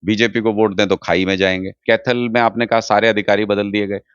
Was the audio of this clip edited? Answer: yes; 1 cut; at 1.8 s

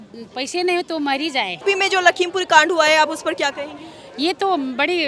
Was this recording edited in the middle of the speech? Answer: yes; 1 cut; at 1.6 s

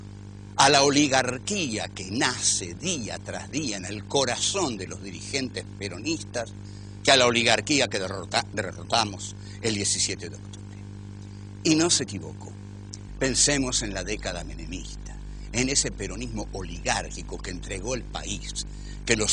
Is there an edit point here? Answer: no; 0 cuts

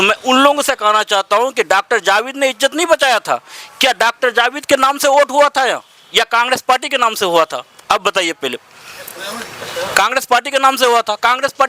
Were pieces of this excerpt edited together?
no; 0 cuts

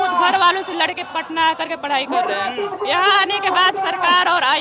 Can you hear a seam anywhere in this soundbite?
no; 0 cuts

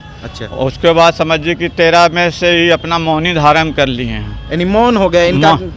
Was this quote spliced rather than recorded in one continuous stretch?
no; 0 cuts

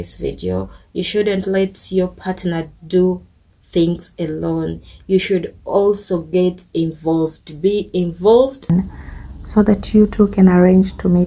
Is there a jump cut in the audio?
yes; 1 cut; at 8.7 s

